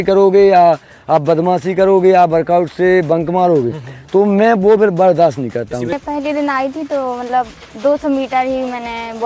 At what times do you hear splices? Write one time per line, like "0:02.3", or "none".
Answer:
0:05.9